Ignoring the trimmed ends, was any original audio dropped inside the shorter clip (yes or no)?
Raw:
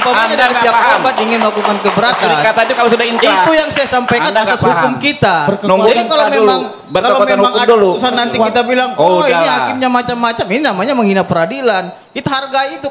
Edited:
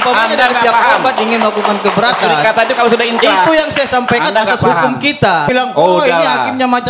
yes